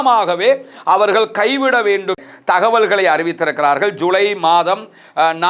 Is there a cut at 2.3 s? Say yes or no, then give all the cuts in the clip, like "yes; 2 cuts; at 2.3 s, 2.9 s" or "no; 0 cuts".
yes; 1 cut; at 2.3 s